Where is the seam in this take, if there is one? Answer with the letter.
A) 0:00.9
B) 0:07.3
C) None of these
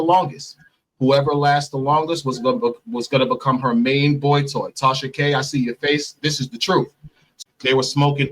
B